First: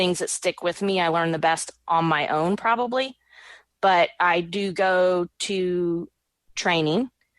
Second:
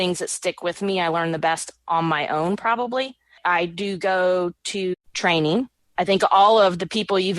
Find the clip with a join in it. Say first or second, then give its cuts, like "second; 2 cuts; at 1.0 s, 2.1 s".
second; 3 cuts; at 3.4 s, 4.9 s, 5.8 s